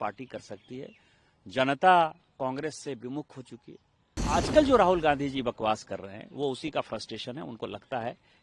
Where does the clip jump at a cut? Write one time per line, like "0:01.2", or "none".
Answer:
0:04.2

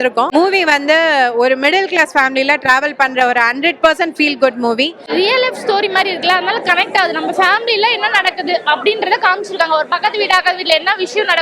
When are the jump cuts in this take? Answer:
0:05.0

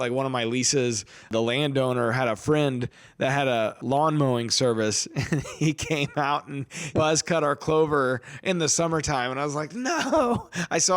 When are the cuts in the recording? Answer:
0:01.3
0:03.8
0:06.9

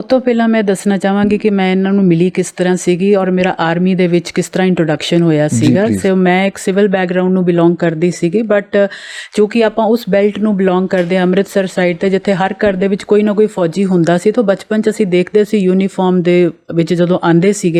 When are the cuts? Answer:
none

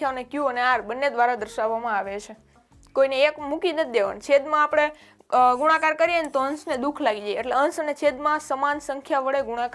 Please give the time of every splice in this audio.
0:02.6

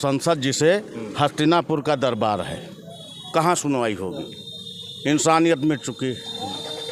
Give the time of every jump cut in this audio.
none

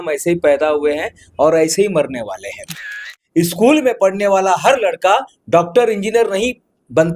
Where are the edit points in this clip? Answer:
0:03.1

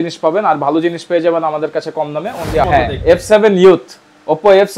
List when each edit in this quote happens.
0:02.7

